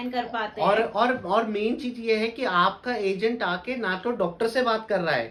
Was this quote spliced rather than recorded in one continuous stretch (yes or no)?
no